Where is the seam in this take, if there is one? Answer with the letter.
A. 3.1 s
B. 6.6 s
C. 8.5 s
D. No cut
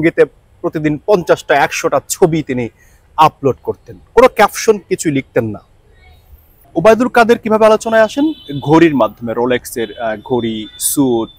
B